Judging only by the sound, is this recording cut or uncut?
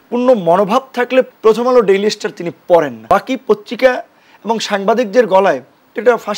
cut